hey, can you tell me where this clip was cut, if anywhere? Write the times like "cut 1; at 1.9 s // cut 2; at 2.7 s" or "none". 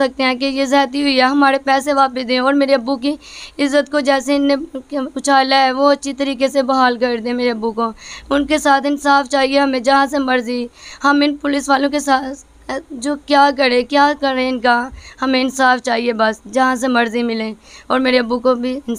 none